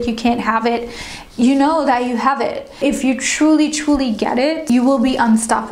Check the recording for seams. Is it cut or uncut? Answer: cut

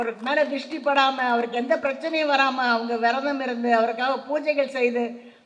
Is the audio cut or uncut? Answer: uncut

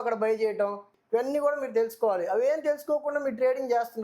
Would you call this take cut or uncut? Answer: cut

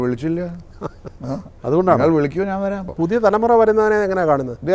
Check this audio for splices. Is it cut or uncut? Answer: cut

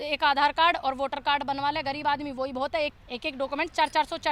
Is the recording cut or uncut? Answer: cut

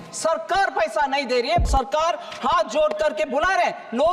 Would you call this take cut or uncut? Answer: cut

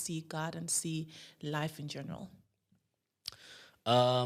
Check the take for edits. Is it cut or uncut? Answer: uncut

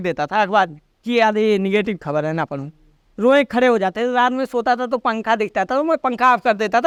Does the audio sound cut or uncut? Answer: uncut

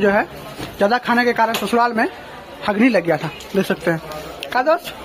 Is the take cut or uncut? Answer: uncut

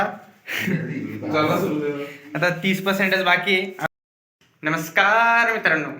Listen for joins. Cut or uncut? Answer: cut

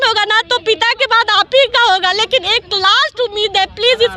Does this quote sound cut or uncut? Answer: uncut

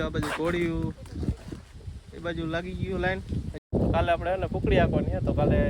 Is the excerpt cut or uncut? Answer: cut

